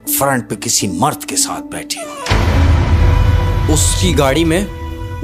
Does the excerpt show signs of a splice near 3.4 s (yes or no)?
no